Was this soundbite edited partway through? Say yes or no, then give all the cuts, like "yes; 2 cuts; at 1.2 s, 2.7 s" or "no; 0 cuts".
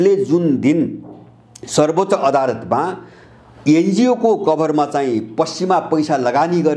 no; 0 cuts